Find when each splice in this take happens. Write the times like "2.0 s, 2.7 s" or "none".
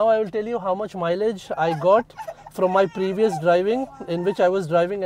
none